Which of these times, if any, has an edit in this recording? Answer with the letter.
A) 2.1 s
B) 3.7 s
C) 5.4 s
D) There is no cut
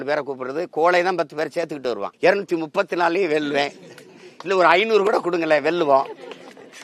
A